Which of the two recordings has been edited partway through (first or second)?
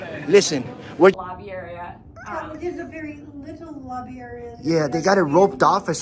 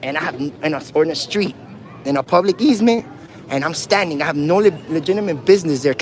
first